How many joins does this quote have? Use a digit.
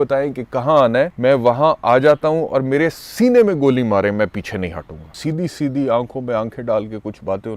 2